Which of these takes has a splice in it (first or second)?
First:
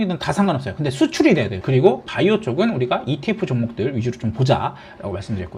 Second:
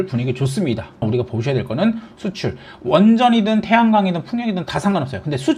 second